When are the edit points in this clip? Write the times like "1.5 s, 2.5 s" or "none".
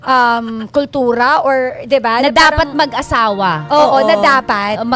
none